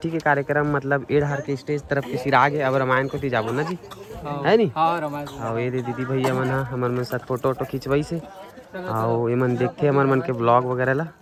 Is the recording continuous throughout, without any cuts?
yes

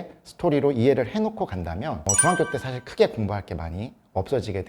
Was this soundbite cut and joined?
no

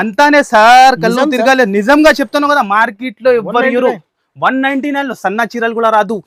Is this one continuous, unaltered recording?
yes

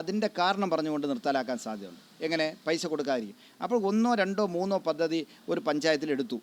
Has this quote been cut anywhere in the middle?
no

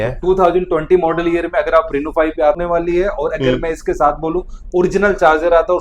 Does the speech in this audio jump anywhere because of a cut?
yes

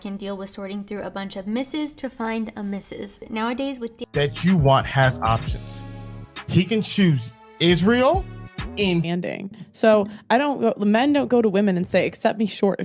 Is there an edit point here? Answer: yes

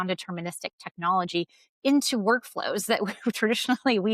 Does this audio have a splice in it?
no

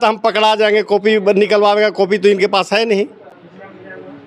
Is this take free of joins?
yes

